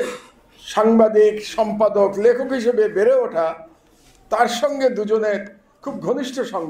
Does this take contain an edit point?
no; 0 cuts

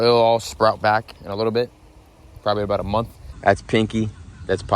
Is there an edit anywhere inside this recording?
yes; 1 cut; at 3.3 s

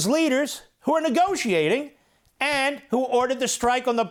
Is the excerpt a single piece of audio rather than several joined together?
yes; 0 cuts

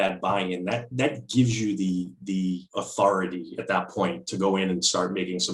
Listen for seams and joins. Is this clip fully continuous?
yes; 0 cuts

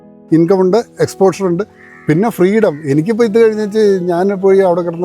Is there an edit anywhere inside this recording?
no; 0 cuts

